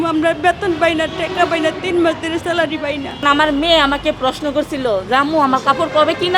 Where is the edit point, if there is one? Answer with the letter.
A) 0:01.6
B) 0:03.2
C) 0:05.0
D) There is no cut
B